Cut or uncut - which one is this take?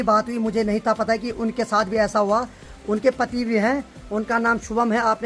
uncut